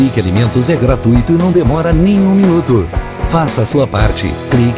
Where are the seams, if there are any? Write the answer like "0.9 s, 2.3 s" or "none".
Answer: none